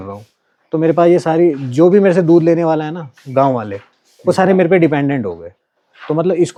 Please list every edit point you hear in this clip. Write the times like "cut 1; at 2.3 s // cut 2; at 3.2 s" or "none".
none